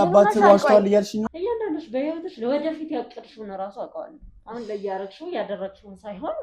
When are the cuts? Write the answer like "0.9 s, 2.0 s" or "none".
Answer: 1.3 s

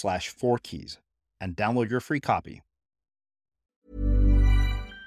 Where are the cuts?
3.8 s

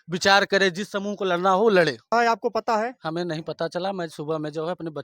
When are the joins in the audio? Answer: 2.1 s

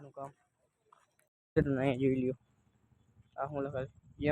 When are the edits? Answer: 1.3 s

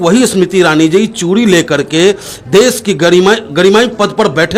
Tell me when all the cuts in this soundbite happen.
none

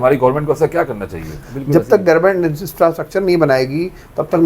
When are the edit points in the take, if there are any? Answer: 1.4 s

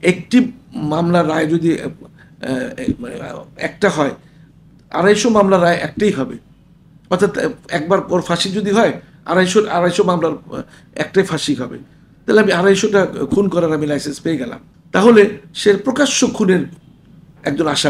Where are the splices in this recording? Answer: none

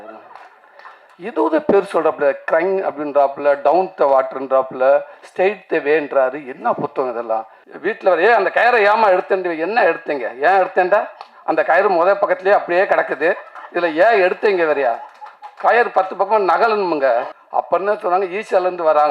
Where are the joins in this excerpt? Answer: 7.6 s, 17.3 s

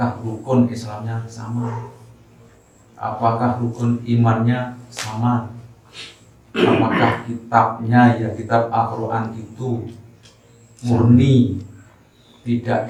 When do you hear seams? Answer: none

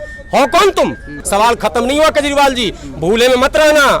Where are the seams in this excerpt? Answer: 1.2 s

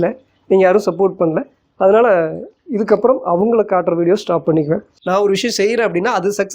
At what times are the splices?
4.9 s

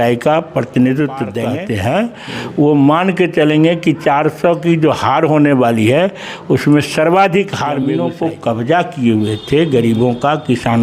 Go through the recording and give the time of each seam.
1.5 s, 7.8 s

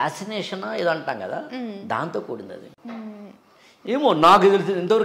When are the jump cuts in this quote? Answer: 2.7 s

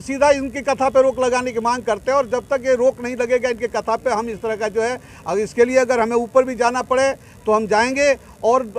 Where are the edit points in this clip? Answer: none

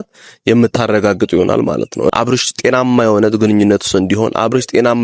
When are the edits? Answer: 2.1 s

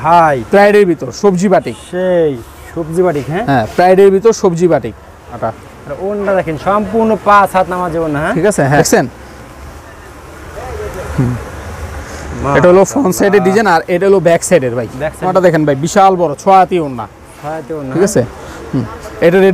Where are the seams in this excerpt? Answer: 5.4 s, 8.8 s, 15.3 s

